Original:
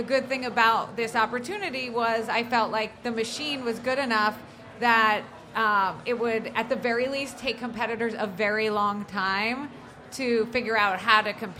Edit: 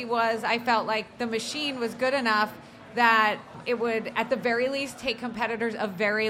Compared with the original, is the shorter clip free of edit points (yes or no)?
no